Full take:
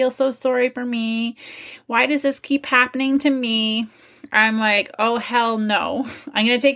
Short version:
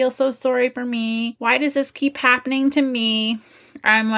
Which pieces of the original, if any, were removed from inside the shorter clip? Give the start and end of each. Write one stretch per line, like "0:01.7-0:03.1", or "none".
0:01.3-0:01.8